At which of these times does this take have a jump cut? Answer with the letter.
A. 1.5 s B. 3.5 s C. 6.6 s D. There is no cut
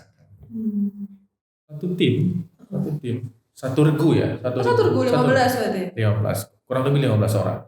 A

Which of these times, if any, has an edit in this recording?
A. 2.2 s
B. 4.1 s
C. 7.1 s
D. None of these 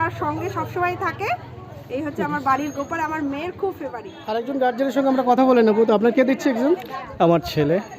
B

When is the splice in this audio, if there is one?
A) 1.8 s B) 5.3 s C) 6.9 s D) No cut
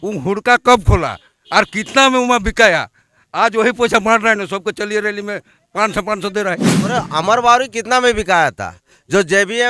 C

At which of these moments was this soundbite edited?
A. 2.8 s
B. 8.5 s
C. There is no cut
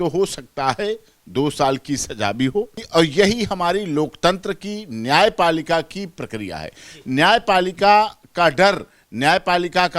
A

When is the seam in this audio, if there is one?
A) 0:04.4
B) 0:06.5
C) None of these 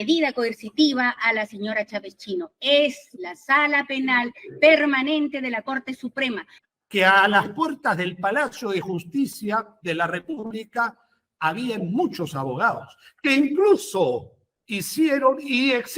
B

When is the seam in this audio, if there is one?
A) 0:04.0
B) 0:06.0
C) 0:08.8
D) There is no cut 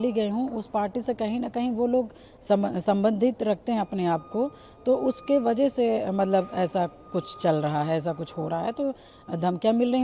D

